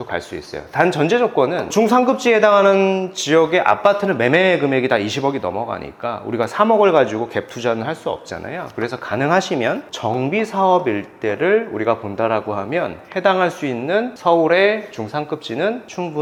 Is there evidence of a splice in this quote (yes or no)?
no